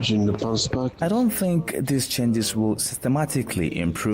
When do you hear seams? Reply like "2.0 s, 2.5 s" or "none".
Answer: 0.9 s